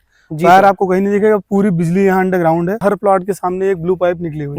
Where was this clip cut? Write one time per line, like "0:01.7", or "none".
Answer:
0:02.8